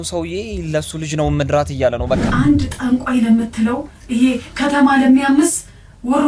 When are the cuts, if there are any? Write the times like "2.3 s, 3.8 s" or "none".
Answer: 2.3 s